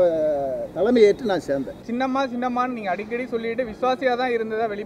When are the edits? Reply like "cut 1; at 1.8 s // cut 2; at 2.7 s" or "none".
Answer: cut 1; at 1.8 s